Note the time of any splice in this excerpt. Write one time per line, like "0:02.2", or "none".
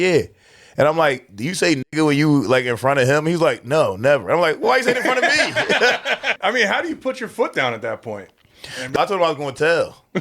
0:06.2
0:08.9